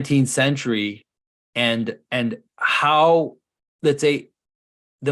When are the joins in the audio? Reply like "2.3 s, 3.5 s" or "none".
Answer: none